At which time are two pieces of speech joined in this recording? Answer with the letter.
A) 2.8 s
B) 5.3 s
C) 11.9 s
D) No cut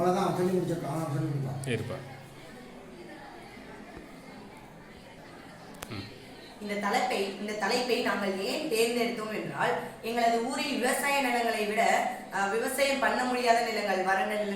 B